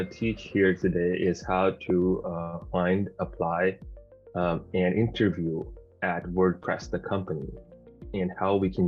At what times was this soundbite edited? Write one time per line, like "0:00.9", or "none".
none